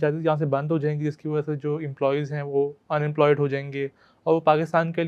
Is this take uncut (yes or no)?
yes